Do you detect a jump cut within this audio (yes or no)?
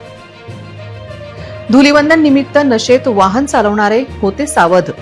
no